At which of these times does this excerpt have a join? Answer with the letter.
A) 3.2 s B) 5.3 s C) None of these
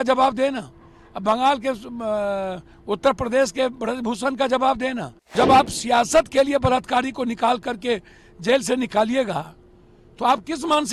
B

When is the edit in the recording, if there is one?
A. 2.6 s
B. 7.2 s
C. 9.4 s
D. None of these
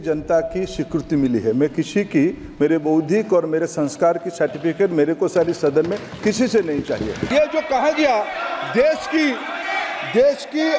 B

